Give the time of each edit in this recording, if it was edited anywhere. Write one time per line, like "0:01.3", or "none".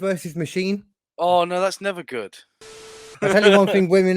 0:01.0
0:02.6